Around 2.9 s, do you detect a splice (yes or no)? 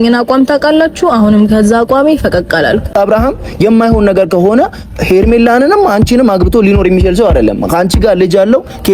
yes